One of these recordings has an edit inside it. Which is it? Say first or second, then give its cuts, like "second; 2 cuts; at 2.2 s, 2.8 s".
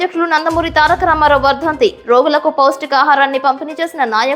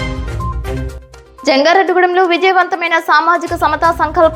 second; 1 cut; at 1.0 s